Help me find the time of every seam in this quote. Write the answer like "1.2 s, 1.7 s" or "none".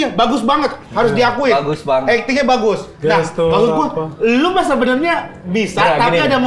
none